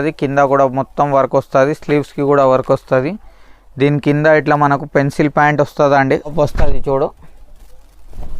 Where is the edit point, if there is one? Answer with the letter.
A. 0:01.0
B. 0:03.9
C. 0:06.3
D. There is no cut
C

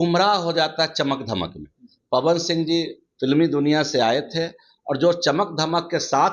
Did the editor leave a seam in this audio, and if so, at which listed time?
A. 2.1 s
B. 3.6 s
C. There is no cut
C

